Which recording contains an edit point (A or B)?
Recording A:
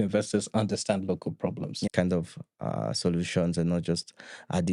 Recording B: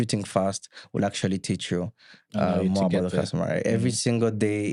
A